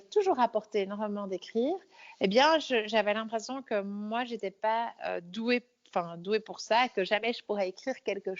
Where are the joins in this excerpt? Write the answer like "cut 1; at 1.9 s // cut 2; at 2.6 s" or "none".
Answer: none